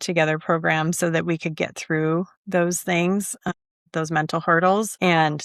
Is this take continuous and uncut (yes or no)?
yes